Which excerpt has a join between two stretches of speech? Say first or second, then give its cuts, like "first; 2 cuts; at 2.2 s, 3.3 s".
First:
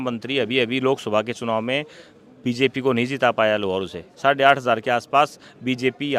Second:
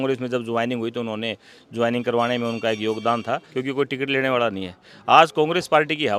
second; 1 cut; at 3.5 s